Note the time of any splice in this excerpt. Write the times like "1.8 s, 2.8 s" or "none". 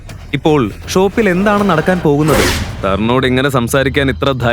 2.6 s